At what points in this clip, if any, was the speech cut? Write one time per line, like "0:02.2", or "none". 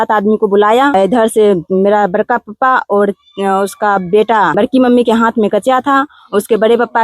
0:00.9
0:04.6